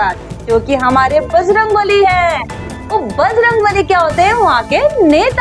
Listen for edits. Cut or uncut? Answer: uncut